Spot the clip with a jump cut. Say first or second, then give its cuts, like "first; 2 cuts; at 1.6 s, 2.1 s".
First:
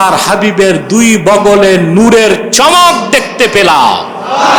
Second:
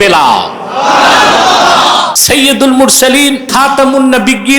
second; 2 cuts; at 2.2 s, 3.4 s